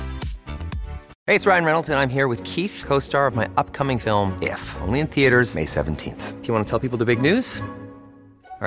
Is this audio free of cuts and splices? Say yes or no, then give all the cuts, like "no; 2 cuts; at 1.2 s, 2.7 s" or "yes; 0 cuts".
no; 1 cut; at 1.1 s